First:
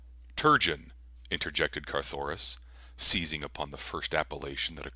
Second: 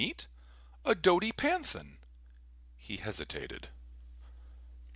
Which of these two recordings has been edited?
first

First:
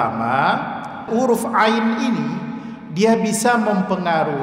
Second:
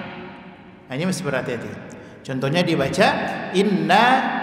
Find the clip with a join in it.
first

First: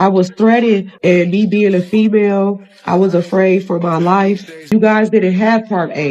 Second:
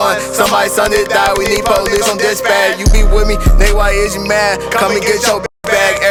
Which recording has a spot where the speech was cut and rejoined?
first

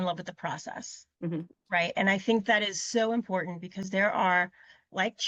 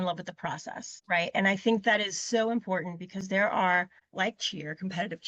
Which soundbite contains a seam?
second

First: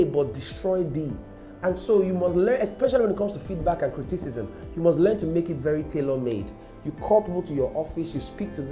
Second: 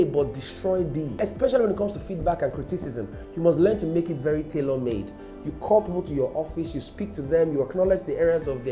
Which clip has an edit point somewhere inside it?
second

